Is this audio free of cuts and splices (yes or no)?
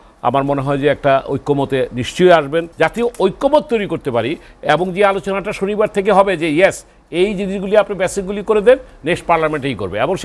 no